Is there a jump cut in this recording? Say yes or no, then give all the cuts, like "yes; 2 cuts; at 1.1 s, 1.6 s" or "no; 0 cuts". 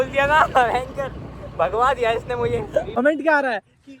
yes; 1 cut; at 3.0 s